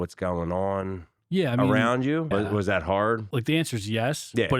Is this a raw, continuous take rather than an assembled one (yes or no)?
no